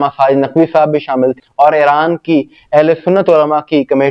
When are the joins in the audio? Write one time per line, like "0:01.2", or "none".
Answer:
0:01.4